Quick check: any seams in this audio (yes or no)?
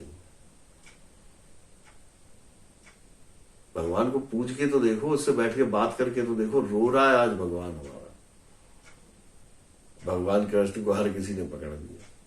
yes